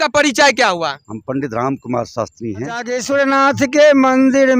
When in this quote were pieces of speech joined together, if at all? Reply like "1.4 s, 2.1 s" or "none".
2.9 s